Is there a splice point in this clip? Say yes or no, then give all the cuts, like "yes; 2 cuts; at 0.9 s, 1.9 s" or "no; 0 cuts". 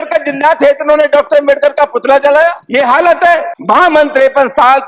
yes; 2 cuts; at 2.6 s, 3.5 s